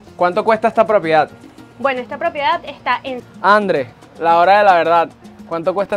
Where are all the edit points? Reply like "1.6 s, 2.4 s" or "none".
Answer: 3.2 s